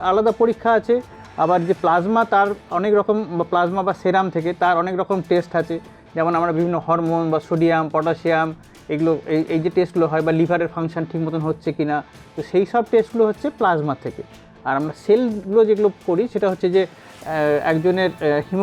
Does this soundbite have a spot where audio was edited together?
no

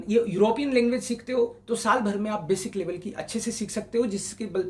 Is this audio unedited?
yes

